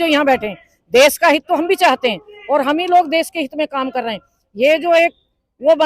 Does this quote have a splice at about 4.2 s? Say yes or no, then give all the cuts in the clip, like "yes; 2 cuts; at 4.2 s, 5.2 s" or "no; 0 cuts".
no; 0 cuts